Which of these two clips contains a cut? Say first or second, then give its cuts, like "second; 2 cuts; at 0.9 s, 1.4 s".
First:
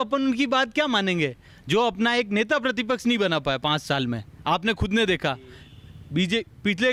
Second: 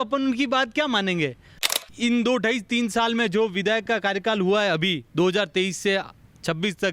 second; 1 cut; at 1.5 s